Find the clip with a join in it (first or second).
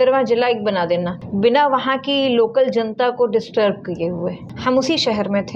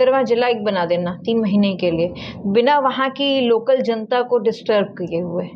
first